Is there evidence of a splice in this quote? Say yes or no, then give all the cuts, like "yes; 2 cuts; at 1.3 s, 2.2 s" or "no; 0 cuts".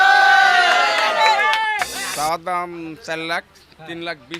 yes; 1 cut; at 2.0 s